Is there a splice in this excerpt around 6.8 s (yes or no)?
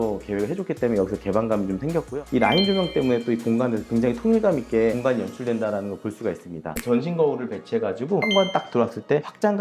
yes